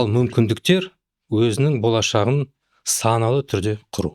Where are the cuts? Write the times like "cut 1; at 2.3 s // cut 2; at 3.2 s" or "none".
none